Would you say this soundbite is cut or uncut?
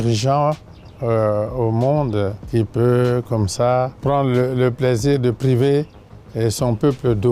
cut